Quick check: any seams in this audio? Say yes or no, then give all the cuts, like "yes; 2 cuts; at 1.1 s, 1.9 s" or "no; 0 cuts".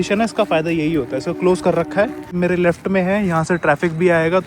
yes; 1 cut; at 2.3 s